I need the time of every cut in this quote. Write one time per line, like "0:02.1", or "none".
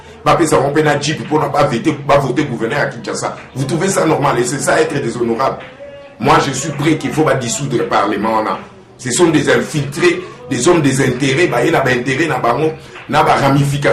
none